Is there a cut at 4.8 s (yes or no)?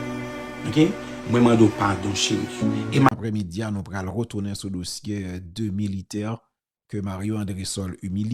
no